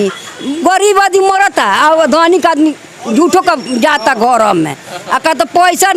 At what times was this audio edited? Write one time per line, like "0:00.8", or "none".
none